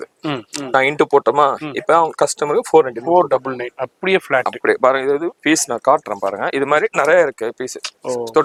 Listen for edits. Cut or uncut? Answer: uncut